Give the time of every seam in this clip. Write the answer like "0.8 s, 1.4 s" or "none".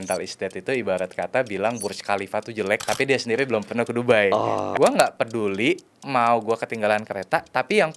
2.8 s, 4.7 s